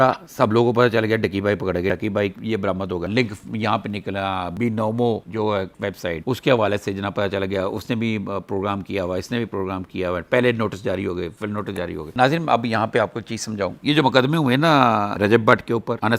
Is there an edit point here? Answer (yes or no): no